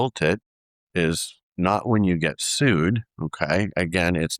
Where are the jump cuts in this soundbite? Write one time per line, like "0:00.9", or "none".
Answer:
none